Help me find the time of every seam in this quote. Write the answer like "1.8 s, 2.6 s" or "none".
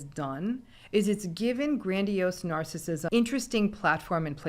3.0 s